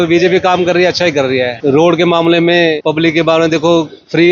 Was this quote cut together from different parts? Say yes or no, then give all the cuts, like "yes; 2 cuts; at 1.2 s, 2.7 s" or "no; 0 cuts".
yes; 2 cuts; at 1.5 s, 2.8 s